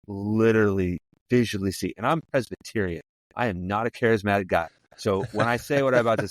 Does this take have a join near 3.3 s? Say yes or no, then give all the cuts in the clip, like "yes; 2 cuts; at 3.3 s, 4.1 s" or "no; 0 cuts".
no; 1 cut; at 1.1 s